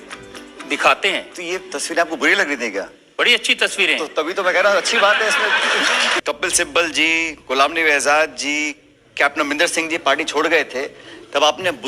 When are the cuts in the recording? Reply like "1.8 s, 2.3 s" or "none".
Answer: 6.2 s